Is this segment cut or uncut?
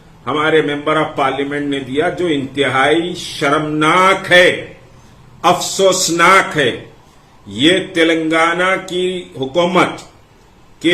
uncut